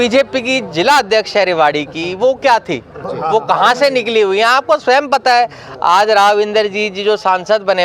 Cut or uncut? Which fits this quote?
uncut